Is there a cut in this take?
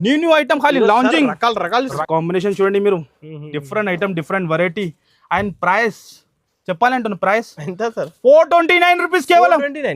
yes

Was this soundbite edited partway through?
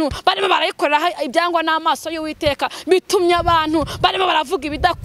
no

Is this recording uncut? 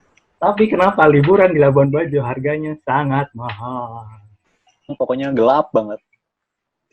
no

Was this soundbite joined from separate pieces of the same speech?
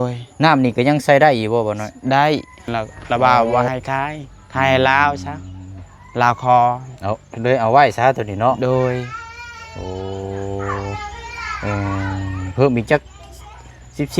yes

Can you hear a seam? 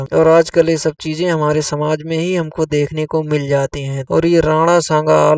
yes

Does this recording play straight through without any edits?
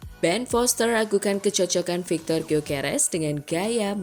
yes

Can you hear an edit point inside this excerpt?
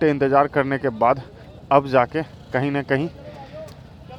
no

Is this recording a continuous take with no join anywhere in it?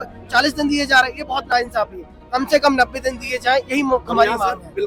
yes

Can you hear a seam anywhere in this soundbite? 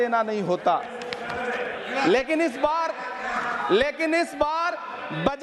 no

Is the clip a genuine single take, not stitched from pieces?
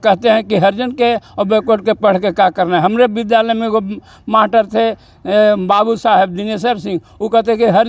yes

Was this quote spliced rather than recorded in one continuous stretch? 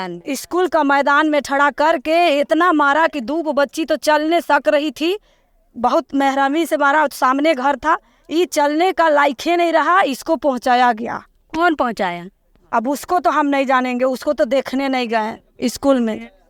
no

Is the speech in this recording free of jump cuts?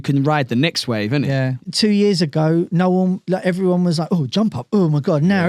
no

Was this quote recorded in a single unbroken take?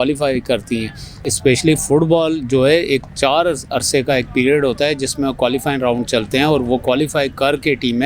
no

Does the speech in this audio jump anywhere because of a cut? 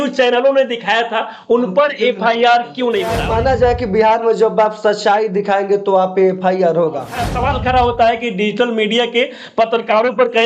yes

